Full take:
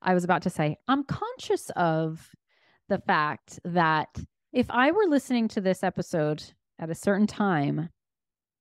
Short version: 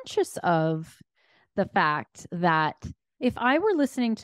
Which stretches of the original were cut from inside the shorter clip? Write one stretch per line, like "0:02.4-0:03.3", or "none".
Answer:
none